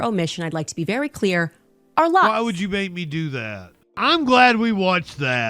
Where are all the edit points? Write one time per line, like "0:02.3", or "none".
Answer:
0:03.8